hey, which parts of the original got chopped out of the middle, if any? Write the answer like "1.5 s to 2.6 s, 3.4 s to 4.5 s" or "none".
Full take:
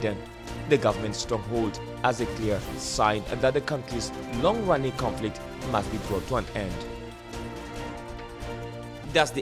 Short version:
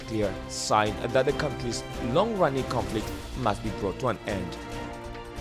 6.7 s to 7.5 s